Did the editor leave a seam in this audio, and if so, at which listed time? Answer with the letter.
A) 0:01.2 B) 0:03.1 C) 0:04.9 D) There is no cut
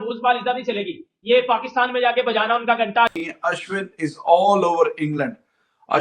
B